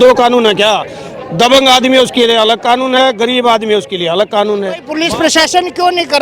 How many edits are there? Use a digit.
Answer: 1